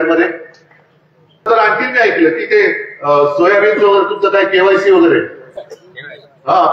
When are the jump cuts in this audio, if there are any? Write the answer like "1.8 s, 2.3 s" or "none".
1.5 s